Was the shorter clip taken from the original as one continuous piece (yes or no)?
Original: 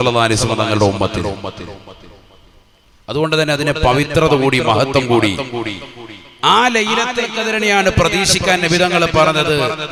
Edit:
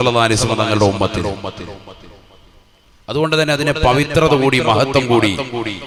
yes